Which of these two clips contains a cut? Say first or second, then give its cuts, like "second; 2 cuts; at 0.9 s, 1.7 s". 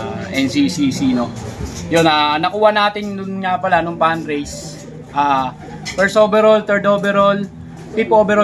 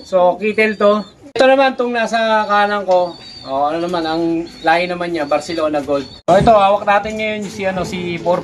second; 2 cuts; at 1.2 s, 6.1 s